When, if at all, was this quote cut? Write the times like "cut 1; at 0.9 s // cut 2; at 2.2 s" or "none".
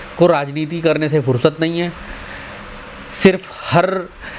none